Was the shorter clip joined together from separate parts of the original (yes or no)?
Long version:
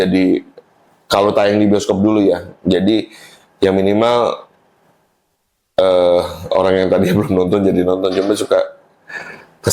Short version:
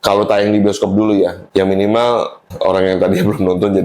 yes